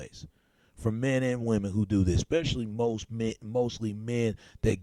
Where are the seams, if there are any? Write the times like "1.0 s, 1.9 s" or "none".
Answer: none